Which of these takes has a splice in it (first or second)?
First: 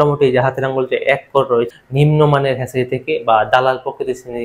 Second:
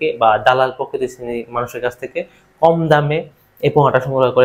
first